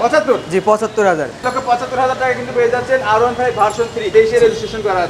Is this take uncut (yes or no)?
no